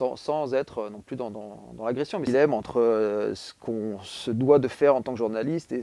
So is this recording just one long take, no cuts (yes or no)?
no